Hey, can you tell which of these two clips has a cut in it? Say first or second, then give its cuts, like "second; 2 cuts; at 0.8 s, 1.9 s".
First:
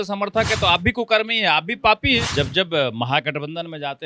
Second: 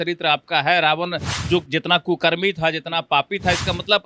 first; 1 cut; at 2.3 s